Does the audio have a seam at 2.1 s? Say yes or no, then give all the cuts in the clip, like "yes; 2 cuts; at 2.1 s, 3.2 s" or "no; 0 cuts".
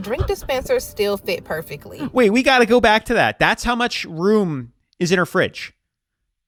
no; 0 cuts